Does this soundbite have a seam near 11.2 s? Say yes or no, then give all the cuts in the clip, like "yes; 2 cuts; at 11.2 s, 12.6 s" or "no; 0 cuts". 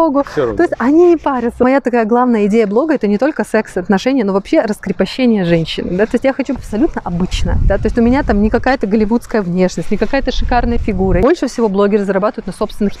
yes; 3 cuts; at 1.6 s, 6.6 s, 11.2 s